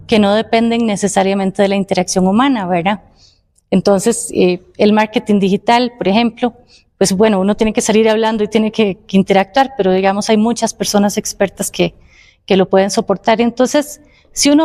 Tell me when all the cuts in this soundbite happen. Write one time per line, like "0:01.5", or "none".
none